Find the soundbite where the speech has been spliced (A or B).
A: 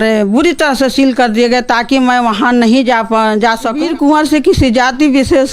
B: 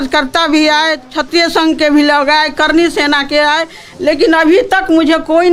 A